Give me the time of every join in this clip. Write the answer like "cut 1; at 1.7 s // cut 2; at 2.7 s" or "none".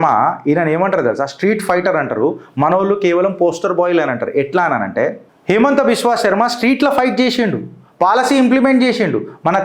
none